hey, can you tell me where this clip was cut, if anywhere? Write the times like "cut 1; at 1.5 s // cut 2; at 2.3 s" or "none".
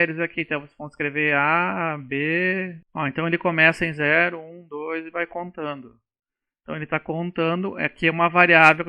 cut 1; at 2.8 s